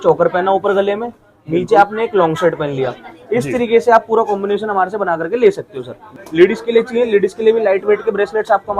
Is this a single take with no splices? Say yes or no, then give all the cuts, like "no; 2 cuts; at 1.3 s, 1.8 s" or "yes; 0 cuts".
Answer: no; 1 cut; at 6.1 s